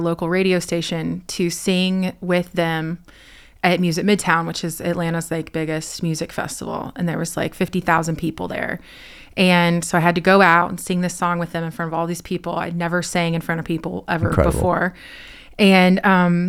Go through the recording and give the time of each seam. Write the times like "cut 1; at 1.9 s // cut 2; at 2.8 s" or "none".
none